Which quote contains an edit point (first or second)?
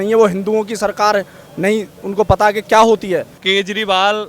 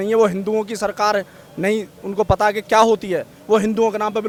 first